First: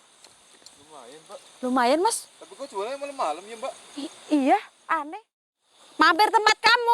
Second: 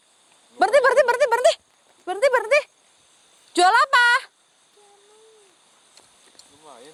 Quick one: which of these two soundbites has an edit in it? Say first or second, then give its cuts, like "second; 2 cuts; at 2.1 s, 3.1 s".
first; 1 cut; at 5.1 s